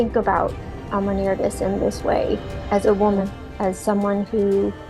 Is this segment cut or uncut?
cut